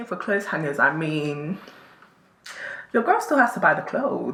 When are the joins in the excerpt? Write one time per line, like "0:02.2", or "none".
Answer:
none